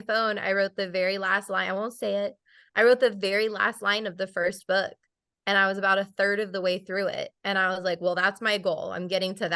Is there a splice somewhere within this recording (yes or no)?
no